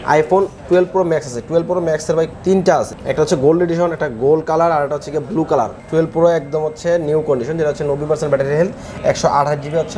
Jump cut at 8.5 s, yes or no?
no